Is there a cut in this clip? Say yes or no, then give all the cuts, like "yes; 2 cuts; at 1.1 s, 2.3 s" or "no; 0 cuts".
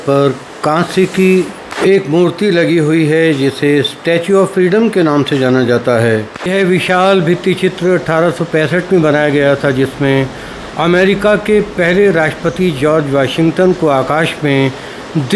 yes; 1 cut; at 6.4 s